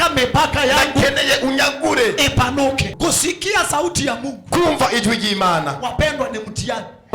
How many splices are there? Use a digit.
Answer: 1